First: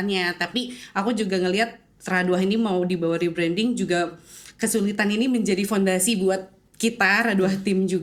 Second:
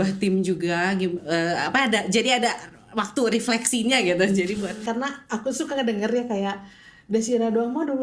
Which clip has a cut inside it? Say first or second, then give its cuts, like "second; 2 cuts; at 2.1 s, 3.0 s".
second; 1 cut; at 4.8 s